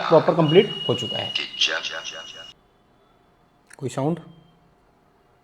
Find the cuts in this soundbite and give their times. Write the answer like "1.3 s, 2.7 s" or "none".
2.4 s